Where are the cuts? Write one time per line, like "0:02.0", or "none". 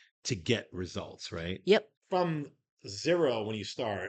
0:02.0